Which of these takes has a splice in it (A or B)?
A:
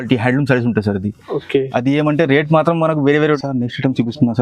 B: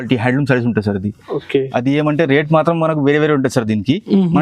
A